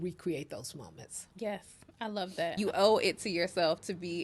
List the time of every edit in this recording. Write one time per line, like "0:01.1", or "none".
0:02.5